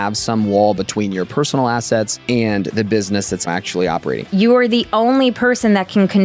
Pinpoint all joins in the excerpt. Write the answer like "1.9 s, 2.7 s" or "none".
2.2 s, 3.8 s